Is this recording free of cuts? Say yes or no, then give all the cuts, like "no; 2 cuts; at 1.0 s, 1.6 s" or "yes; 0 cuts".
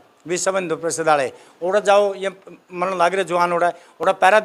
yes; 0 cuts